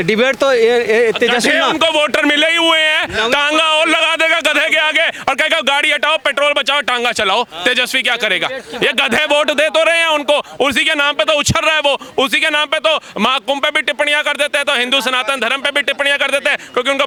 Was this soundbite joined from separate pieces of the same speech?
no; 0 cuts

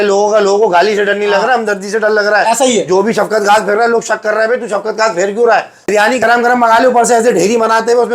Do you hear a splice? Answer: yes; 1 cut; at 5.9 s

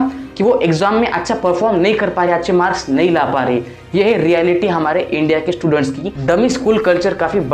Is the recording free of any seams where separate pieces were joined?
no; 1 cut; at 6.1 s

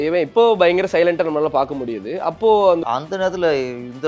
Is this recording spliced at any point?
yes; 1 cut; at 2.8 s

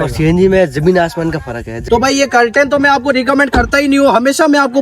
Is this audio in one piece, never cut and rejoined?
no; 1 cut; at 1.9 s

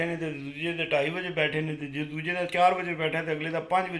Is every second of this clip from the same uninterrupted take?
yes; 0 cuts

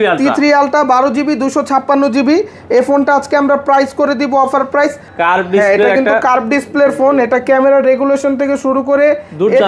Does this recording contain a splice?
yes; 1 cut; at 5.1 s

